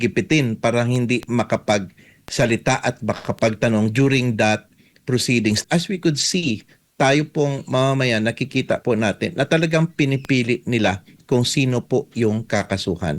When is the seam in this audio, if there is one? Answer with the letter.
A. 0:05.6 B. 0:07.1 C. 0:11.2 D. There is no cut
A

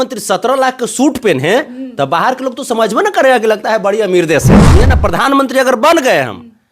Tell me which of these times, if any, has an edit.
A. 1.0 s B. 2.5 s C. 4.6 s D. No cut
C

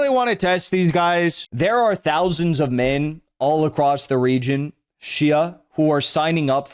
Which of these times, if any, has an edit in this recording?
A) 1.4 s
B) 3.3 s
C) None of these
A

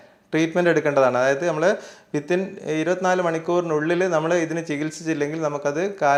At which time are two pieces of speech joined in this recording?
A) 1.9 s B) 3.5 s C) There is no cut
C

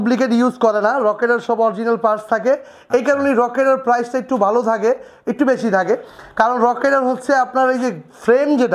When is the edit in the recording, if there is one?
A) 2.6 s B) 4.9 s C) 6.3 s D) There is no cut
D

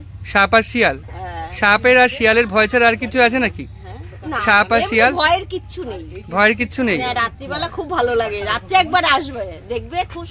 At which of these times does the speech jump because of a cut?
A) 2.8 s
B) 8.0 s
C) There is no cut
C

